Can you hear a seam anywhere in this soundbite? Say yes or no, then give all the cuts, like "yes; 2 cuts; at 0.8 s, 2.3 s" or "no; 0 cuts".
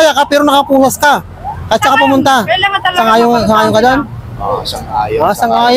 no; 0 cuts